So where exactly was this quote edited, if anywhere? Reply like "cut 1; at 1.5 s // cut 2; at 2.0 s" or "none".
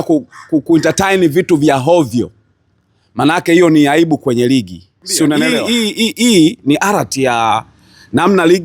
cut 1; at 5.6 s